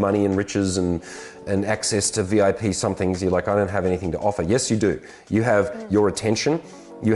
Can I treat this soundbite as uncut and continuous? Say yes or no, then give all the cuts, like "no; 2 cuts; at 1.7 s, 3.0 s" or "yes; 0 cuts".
yes; 0 cuts